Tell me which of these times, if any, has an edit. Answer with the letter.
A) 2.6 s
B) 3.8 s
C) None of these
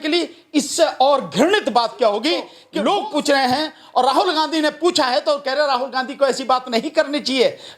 A